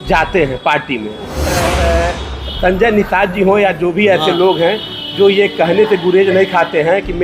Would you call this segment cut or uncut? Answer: cut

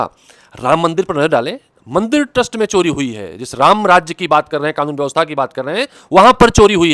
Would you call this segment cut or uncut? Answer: uncut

